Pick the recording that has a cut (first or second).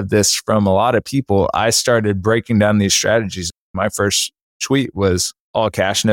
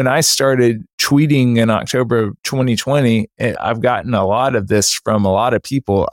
second